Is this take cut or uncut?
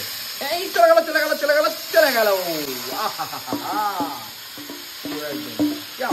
uncut